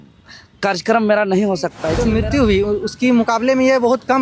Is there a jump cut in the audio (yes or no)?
yes